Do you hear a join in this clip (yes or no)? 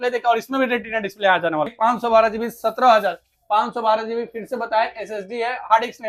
yes